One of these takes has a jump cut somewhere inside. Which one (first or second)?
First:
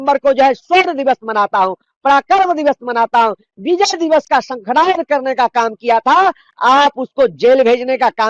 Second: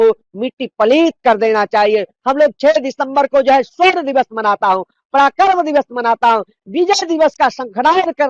second